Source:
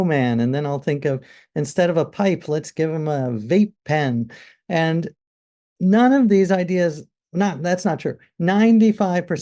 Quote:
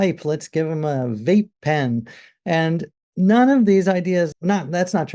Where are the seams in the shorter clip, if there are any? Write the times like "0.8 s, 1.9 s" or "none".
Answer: 3.0 s, 4.4 s